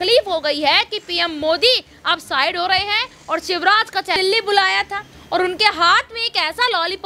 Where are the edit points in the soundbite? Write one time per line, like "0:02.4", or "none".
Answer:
0:04.2